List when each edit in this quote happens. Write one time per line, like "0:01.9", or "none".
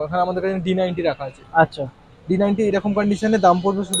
none